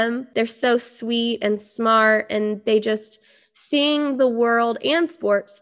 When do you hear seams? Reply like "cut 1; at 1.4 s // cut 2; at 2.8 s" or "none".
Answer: none